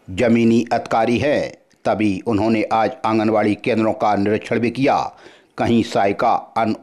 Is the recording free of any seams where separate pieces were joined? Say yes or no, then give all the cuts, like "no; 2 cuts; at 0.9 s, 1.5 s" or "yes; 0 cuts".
yes; 0 cuts